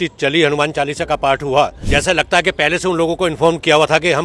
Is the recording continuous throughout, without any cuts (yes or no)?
no